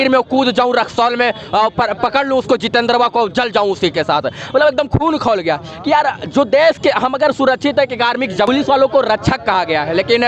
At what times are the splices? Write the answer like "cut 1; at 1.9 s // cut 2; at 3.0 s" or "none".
cut 1; at 8.5 s

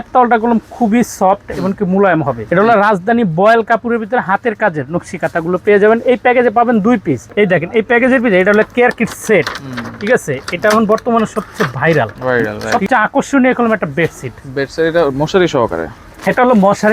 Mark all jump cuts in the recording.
cut 1; at 2.4 s // cut 2; at 7.2 s // cut 3; at 12.6 s

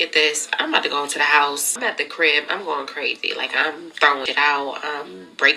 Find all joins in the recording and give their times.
cut 1; at 1.8 s // cut 2; at 4.3 s

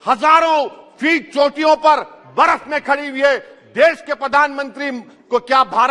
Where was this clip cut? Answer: none

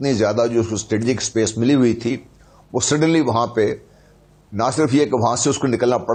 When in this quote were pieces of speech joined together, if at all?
none

